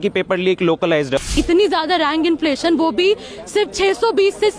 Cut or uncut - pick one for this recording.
cut